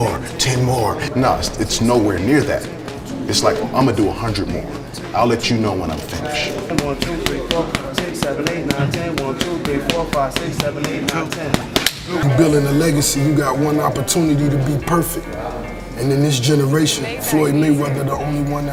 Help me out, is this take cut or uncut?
uncut